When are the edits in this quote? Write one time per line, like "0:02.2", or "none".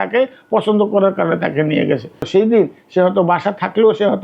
0:02.3